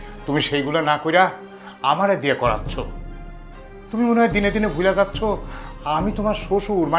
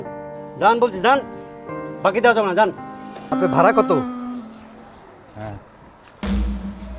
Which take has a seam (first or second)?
second